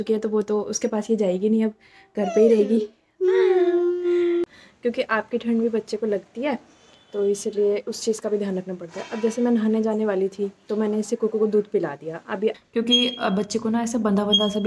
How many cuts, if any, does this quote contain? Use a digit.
2